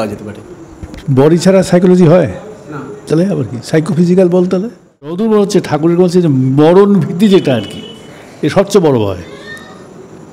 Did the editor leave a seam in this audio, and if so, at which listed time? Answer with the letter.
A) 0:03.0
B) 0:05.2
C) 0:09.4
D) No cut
B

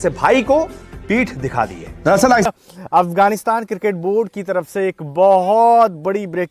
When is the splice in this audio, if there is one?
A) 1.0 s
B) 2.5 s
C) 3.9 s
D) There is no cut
B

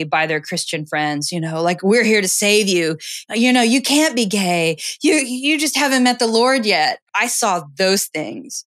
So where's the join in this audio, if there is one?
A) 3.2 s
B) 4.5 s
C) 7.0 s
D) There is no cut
C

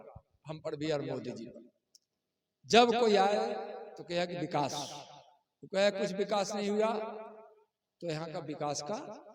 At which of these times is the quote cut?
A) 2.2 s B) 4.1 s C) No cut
C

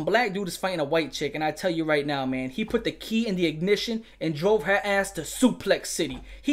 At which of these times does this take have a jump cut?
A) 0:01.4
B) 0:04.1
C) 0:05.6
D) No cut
D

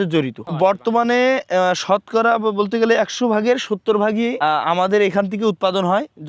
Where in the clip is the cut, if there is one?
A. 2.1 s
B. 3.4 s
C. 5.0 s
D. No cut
D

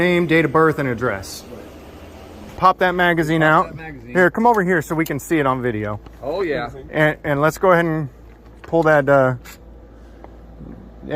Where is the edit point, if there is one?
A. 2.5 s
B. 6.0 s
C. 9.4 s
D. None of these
A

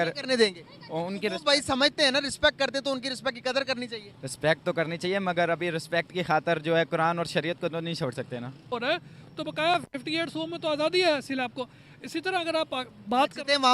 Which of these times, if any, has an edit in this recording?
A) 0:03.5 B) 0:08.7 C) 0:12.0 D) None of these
B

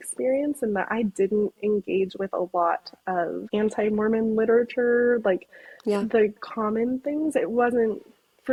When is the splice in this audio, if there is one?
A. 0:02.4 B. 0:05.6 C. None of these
C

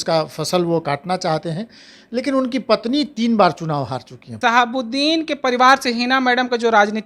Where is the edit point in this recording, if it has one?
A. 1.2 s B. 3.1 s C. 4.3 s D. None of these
C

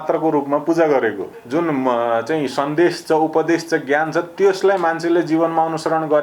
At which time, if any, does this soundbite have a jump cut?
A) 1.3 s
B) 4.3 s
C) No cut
A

